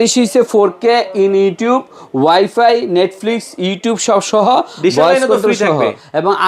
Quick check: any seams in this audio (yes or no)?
no